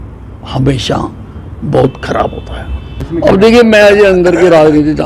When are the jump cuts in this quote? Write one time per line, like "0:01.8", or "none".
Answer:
0:02.9